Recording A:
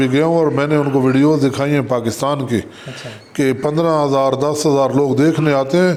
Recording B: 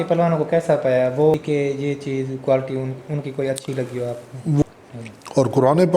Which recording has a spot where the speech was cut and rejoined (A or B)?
B